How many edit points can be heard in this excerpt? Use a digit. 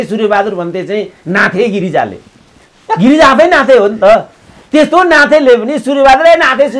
0